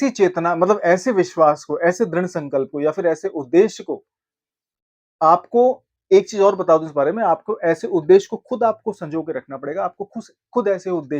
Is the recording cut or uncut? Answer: uncut